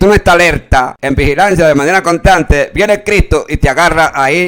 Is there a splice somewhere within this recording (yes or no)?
yes